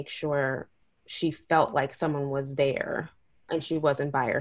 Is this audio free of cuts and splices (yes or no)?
no